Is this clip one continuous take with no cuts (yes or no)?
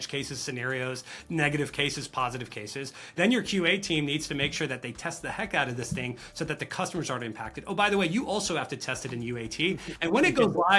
yes